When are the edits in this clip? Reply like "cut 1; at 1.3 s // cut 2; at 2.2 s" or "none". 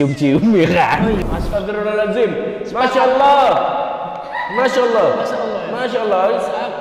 cut 1; at 1.2 s